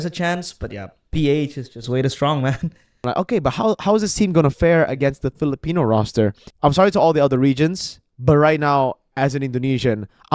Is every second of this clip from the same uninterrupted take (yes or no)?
no